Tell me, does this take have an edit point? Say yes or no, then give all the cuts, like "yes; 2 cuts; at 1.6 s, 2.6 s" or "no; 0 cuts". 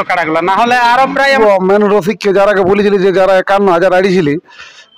yes; 1 cut; at 1.4 s